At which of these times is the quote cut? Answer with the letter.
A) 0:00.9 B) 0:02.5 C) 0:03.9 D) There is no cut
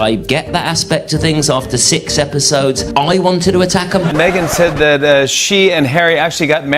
C